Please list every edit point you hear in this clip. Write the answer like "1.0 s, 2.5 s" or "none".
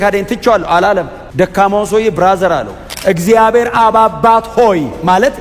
1.2 s, 2.8 s